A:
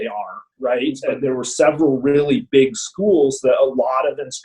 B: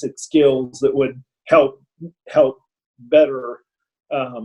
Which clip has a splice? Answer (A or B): A